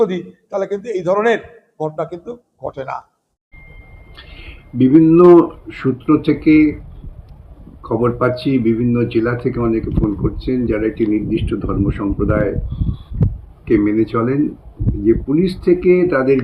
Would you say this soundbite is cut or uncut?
cut